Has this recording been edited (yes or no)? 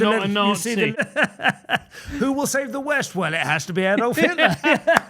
yes